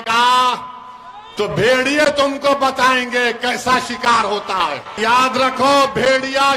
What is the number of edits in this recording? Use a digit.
1